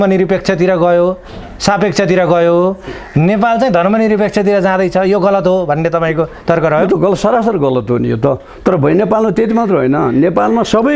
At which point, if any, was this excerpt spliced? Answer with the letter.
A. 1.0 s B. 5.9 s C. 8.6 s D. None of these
D